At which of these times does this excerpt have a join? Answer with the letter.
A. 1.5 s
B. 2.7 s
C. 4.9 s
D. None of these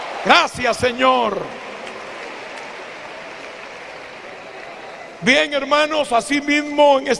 A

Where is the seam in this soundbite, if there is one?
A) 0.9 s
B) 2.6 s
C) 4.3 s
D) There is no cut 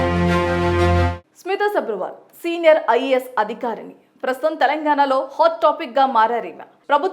A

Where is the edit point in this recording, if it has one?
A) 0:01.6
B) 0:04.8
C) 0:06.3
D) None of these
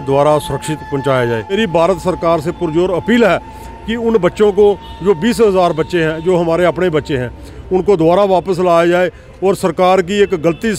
A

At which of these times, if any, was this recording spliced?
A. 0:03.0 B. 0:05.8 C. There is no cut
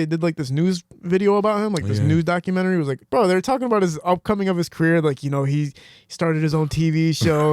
A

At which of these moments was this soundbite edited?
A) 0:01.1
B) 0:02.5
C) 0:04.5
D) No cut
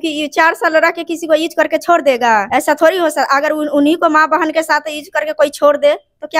B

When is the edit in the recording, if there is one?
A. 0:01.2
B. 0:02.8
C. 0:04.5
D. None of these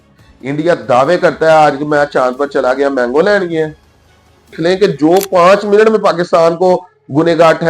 C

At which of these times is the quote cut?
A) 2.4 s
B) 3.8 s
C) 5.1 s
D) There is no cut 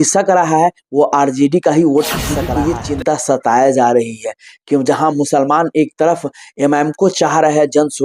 A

